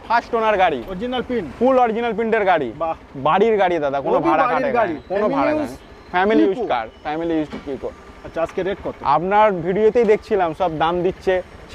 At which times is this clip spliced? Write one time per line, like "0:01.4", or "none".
none

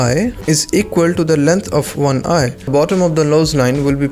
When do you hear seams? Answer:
0:02.7

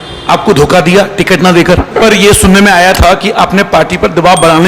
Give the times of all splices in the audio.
0:02.0

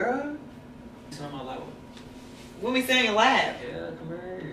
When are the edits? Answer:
0:01.1

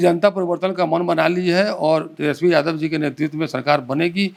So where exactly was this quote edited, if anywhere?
none

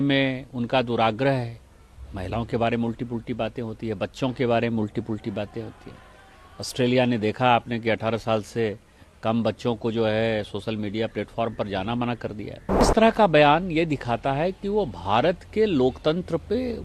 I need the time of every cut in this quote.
0:12.9

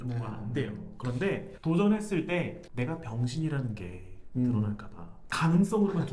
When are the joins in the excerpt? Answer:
none

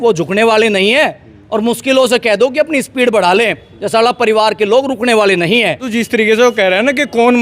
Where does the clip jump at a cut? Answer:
0:05.9

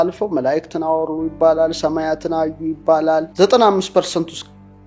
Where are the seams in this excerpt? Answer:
0:03.3

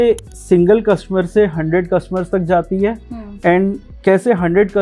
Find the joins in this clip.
none

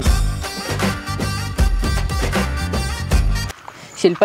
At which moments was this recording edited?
none

